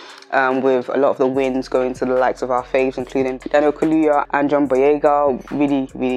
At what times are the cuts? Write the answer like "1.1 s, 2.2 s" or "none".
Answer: none